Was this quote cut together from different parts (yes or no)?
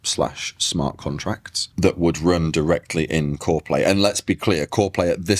no